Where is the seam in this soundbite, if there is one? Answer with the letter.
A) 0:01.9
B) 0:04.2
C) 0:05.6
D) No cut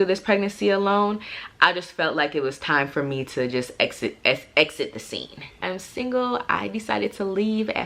C